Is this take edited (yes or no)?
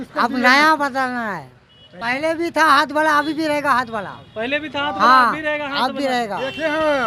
yes